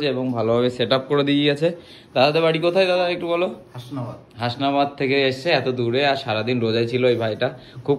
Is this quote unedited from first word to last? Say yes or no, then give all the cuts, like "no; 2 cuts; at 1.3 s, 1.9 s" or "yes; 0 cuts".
yes; 0 cuts